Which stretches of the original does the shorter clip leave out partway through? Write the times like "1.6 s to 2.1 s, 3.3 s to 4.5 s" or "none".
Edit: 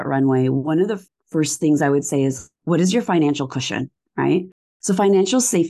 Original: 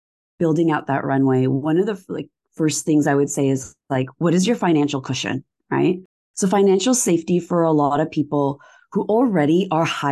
2.1 s to 2.4 s, 3.8 s to 4.1 s